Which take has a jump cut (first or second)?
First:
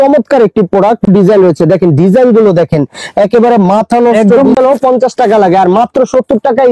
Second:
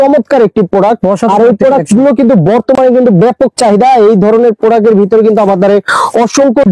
first